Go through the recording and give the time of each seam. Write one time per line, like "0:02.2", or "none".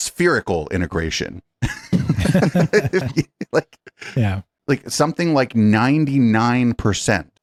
none